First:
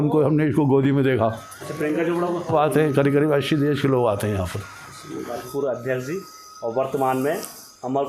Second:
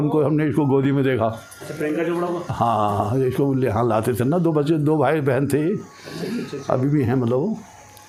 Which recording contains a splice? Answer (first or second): first